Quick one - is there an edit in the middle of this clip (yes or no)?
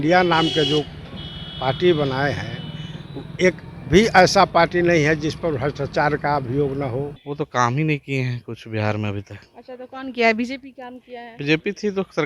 yes